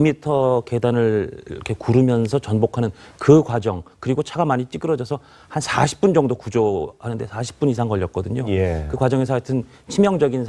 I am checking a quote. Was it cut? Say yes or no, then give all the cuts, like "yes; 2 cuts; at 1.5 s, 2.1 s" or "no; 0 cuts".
yes; 1 cut; at 1.6 s